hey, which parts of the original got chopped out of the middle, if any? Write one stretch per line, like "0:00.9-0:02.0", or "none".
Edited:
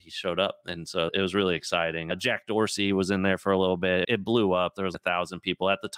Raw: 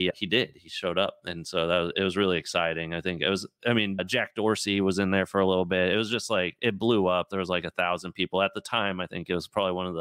0:01.7-0:01.9
0:02.9-0:04.0
0:05.9-0:06.6
0:07.5-0:07.6